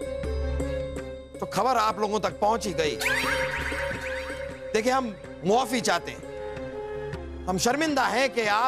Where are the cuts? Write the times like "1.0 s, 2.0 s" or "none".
1.3 s